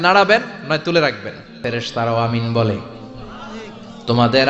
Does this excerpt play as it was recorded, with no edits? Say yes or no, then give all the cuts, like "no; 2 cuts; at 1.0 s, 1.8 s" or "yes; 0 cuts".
no; 1 cut; at 1.6 s